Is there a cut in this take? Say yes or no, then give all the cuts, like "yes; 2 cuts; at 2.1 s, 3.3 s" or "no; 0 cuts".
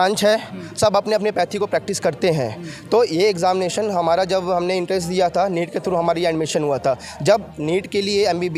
no; 0 cuts